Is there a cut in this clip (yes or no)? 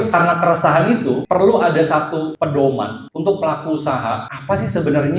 yes